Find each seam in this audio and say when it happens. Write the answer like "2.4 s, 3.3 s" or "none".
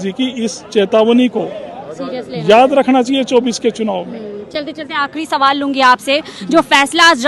none

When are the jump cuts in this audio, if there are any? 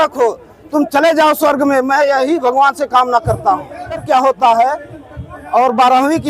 4.0 s

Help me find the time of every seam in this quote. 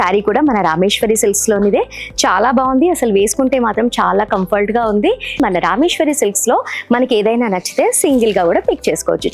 5.4 s

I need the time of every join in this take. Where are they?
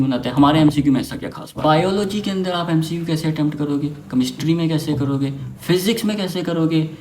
1.5 s

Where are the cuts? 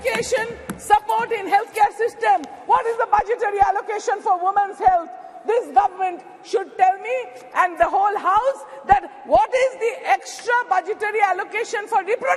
none

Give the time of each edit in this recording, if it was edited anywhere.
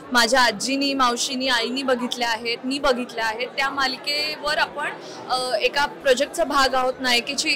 none

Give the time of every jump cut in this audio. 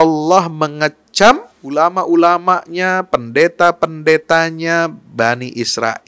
1.5 s

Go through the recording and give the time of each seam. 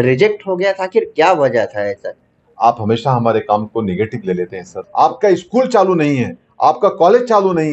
2.1 s, 4.8 s

